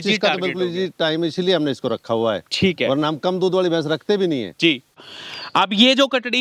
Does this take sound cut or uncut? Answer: cut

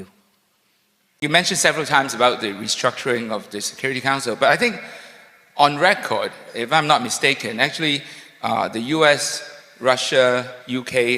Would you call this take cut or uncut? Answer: cut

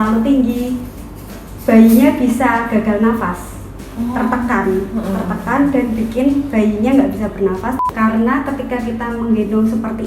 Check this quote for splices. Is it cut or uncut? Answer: cut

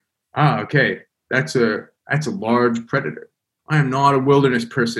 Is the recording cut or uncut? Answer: cut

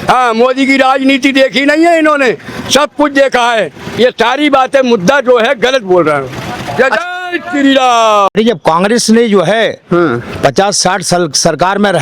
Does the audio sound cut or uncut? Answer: cut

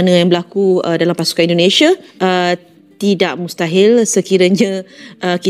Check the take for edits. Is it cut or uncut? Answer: cut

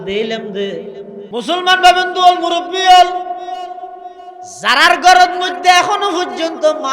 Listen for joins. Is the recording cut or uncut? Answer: cut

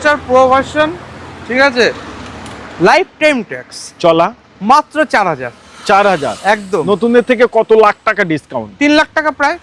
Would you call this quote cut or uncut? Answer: uncut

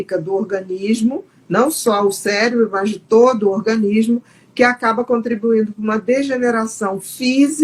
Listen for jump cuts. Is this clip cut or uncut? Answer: uncut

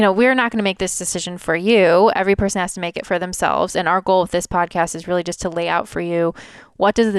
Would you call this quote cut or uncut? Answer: uncut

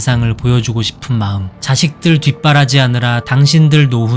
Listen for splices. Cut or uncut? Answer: cut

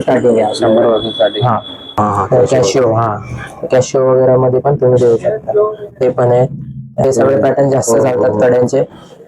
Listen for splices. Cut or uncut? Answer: cut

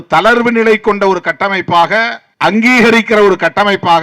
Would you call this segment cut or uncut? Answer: cut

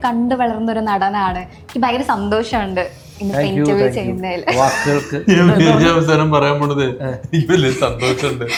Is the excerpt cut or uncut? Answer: uncut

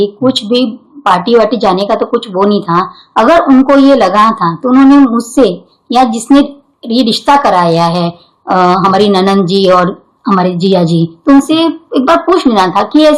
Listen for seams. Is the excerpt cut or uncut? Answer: uncut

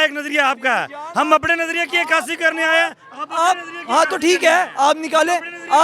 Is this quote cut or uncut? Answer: uncut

